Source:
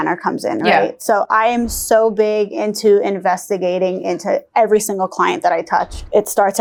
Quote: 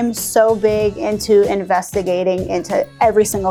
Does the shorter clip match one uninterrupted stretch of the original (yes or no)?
yes